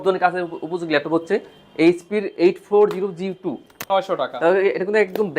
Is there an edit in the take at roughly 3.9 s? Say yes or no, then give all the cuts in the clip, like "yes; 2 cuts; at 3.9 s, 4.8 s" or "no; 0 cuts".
yes; 1 cut; at 3.9 s